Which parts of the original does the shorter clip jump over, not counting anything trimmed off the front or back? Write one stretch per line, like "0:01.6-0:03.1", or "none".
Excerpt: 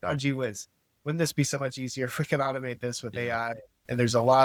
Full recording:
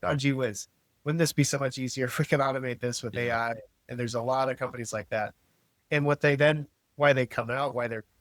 none